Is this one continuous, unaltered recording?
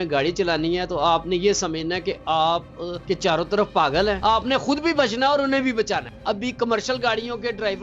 no; 3 cuts; at 2.9 s, 4.2 s, 6.1 s

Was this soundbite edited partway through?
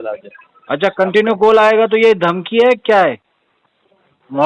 no; 0 cuts

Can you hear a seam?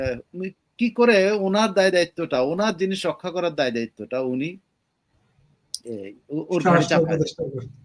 no; 0 cuts

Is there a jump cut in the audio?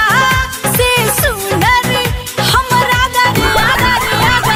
no; 0 cuts

